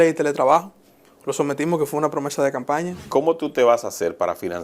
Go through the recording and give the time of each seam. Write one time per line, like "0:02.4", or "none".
0:03.0